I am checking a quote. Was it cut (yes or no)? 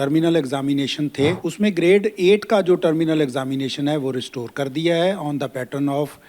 yes